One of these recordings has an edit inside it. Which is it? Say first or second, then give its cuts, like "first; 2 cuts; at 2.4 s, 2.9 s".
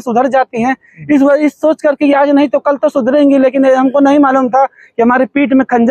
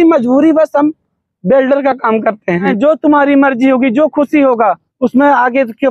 second; 2 cuts; at 2.7 s, 4.9 s